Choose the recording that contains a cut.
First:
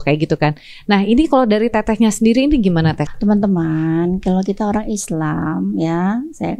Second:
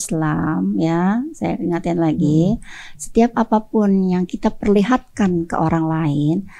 first; 1 cut; at 3.0 s

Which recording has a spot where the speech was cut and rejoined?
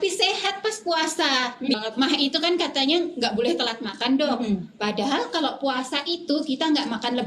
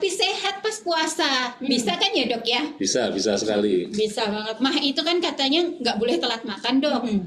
first; 1 cut; at 1.8 s

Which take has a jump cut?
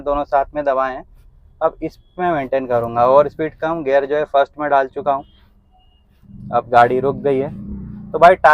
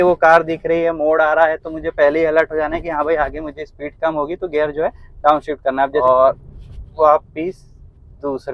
second; 1 cut; at 6.0 s

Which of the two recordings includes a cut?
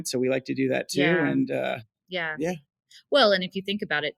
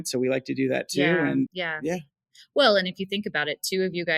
second; 1 cut; at 1.5 s

